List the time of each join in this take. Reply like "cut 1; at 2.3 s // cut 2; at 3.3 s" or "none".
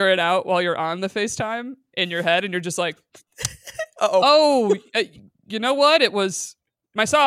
none